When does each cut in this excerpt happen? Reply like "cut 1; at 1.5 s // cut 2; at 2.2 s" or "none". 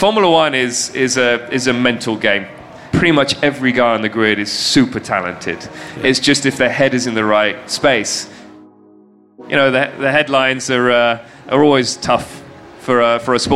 cut 1; at 8.8 s